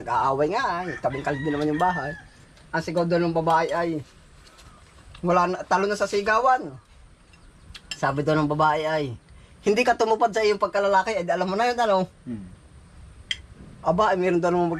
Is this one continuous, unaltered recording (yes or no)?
yes